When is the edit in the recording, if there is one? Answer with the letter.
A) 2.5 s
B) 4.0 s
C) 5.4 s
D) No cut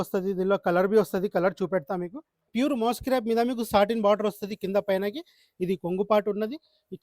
A